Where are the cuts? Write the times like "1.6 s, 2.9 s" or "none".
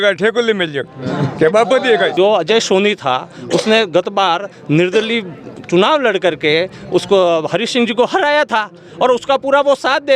2.1 s